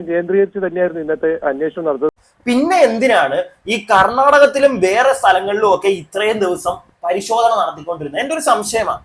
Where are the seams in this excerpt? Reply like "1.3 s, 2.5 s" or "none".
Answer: 2.1 s